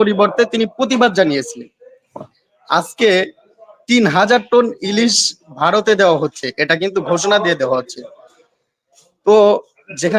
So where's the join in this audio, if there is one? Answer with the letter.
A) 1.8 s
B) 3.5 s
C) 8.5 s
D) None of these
D